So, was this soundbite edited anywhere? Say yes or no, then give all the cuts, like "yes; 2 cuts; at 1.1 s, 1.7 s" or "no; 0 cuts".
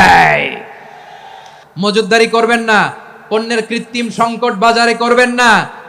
yes; 1 cut; at 1.5 s